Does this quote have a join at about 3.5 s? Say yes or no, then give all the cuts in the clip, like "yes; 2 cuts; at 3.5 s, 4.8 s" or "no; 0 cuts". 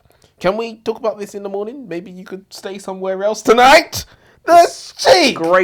no; 0 cuts